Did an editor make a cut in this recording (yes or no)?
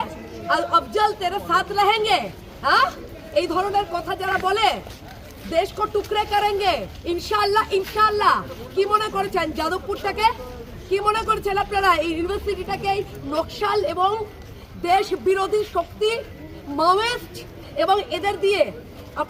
no